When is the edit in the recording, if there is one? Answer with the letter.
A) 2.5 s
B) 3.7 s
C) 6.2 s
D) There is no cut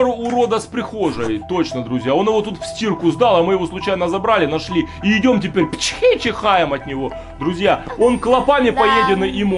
D